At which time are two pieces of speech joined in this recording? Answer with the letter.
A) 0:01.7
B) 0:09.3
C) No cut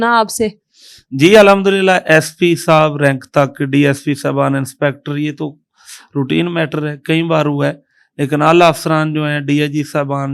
C